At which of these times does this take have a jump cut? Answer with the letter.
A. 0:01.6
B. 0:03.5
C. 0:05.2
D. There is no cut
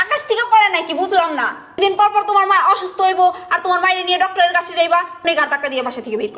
C